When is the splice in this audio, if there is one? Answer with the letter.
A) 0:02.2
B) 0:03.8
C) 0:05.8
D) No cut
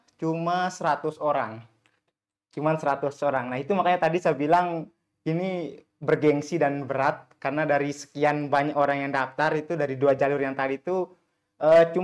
D